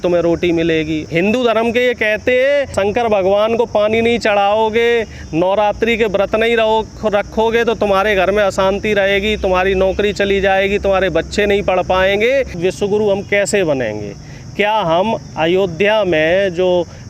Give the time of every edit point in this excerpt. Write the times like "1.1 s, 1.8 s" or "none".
1.0 s, 2.7 s, 12.6 s